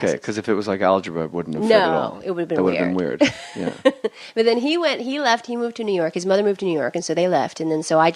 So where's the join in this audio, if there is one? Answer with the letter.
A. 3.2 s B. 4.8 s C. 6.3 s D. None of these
B